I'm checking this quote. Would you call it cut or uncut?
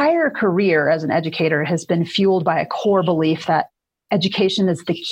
uncut